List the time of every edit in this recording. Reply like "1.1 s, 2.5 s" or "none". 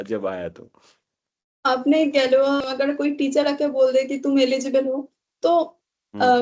2.6 s